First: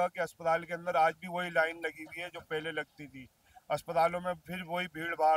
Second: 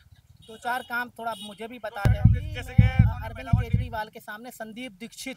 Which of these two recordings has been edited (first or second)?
second